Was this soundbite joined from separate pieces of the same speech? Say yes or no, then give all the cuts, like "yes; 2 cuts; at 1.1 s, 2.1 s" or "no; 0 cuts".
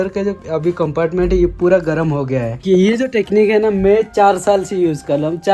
yes; 1 cut; at 2.6 s